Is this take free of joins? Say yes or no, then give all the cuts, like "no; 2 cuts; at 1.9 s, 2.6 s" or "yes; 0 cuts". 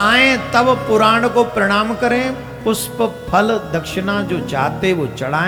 yes; 0 cuts